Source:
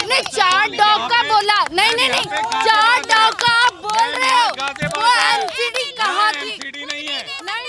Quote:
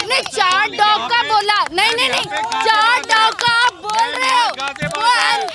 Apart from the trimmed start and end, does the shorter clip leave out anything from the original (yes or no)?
no